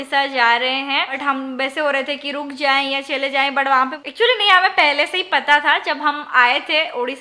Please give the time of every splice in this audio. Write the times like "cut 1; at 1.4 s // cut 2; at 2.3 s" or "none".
cut 1; at 1.2 s // cut 2; at 4.0 s